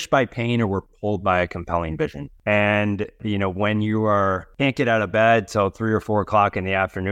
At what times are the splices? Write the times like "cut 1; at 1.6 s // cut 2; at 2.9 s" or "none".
cut 1; at 2.3 s // cut 2; at 3.2 s // cut 3; at 4.5 s